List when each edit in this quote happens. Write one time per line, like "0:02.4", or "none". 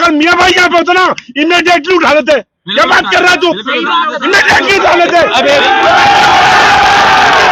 none